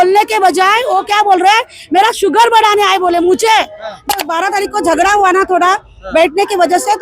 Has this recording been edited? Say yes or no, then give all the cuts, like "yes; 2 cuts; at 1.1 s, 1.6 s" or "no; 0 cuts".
yes; 1 cut; at 4.2 s